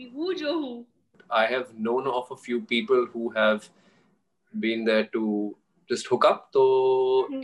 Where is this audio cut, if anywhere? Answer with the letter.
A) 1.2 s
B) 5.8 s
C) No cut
A